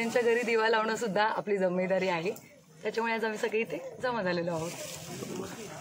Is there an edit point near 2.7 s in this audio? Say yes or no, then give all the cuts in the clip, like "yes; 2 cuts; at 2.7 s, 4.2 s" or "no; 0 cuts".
no; 0 cuts